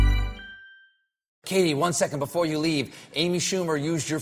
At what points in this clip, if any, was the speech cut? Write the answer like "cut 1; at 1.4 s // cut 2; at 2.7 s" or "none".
cut 1; at 1.4 s